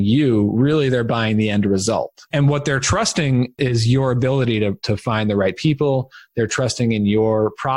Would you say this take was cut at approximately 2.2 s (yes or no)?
yes